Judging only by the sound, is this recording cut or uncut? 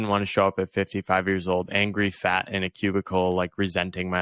uncut